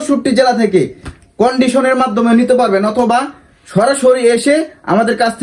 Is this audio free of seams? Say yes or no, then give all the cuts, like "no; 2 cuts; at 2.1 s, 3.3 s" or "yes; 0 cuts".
yes; 0 cuts